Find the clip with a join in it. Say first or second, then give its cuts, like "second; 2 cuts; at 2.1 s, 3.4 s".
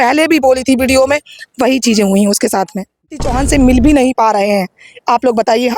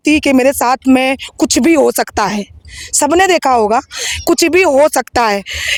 first; 1 cut; at 3.2 s